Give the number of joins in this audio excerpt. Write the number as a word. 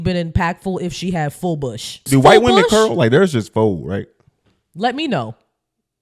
one